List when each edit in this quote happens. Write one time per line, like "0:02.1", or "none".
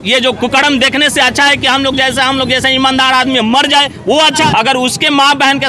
0:04.5